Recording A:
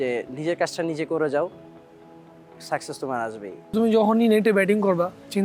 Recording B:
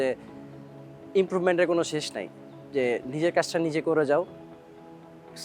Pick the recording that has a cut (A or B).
A